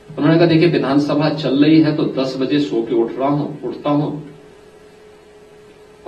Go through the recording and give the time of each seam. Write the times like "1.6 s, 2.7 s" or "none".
none

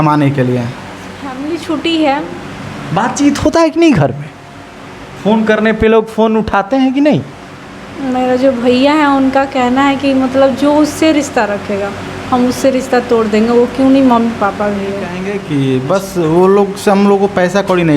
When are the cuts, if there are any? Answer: 1.1 s, 15.5 s

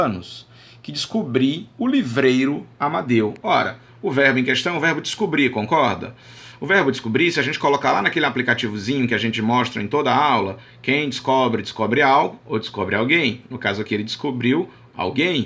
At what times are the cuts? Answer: 2.6 s

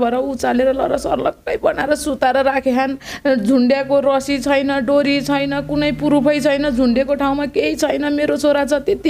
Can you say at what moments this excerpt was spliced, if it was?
none

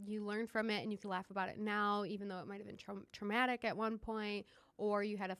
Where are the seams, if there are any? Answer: none

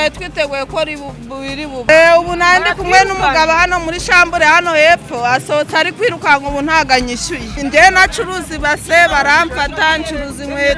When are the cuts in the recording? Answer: 1.9 s, 7.6 s

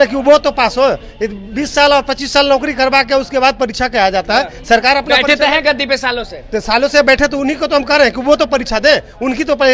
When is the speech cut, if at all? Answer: none

